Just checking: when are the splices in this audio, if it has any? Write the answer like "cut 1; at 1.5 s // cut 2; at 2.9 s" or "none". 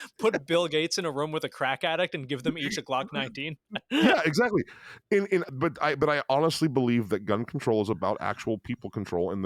none